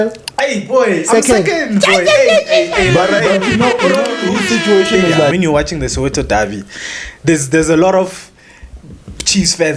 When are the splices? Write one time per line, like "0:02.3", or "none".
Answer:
0:05.3

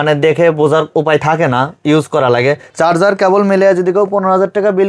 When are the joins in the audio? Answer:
0:02.7

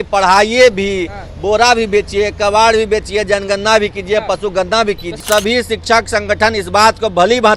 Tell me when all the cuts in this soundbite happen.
0:05.2

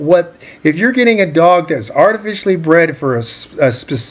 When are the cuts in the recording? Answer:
none

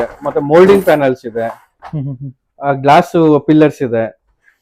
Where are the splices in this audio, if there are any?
none

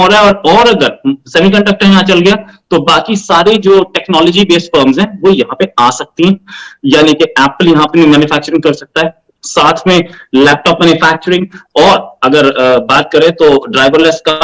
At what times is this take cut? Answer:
none

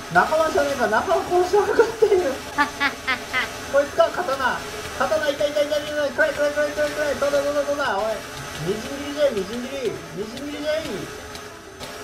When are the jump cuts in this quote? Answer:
none

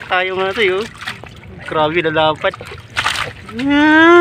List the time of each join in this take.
none

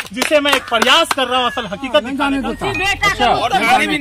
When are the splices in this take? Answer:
0:02.2

